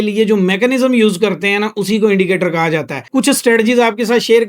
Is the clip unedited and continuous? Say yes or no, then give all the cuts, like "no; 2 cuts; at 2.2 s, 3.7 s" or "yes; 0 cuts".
no; 1 cut; at 3.0 s